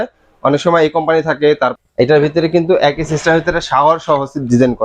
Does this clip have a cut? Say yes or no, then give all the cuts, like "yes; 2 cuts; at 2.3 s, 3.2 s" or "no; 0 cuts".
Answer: yes; 1 cut; at 1.7 s